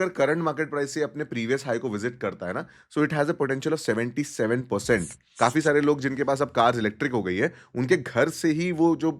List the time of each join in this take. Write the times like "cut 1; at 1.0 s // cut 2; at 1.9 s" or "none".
cut 1; at 5.2 s

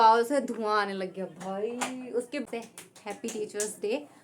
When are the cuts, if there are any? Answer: cut 1; at 2.5 s

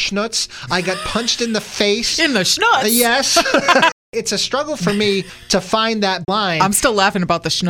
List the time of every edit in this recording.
cut 1; at 4.0 s // cut 2; at 5.4 s // cut 3; at 6.3 s

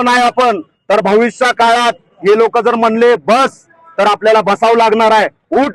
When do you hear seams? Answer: none

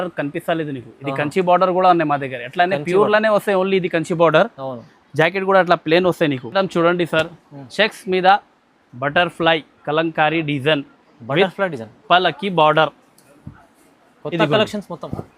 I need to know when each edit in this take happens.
cut 1; at 6.4 s

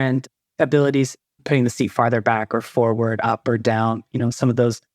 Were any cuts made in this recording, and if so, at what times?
cut 1; at 1.3 s

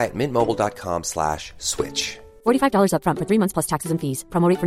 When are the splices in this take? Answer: none

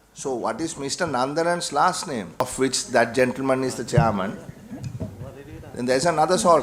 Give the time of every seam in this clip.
cut 1; at 2.4 s

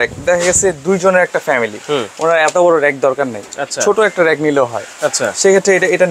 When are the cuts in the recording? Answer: none

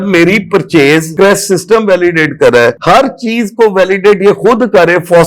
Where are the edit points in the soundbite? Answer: cut 1; at 1.1 s

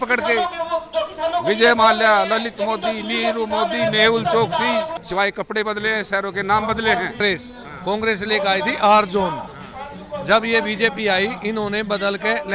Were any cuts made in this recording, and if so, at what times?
cut 1; at 4.9 s // cut 2; at 7.2 s

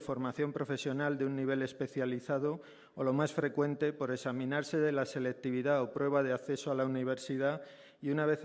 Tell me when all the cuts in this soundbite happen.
cut 1; at 3.9 s

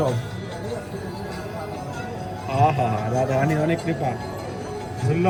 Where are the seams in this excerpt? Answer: none

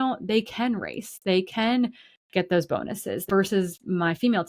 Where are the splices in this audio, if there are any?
cut 1; at 3.2 s

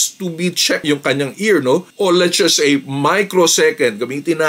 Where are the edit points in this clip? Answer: cut 1; at 0.9 s // cut 2; at 1.9 s

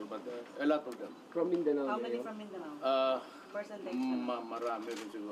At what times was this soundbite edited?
cut 1; at 3.3 s

